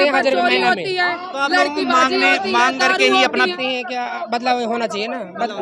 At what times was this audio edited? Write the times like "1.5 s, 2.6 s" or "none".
3.5 s